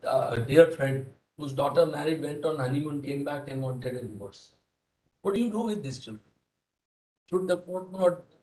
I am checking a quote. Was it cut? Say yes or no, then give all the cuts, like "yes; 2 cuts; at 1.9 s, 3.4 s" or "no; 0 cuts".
no; 0 cuts